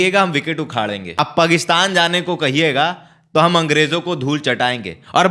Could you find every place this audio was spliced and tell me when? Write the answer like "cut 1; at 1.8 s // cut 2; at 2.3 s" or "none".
cut 1; at 1.2 s